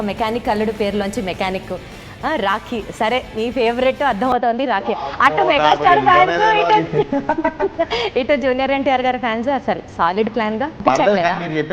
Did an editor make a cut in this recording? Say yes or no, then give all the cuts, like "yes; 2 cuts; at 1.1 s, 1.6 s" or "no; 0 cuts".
yes; 1 cut; at 10.8 s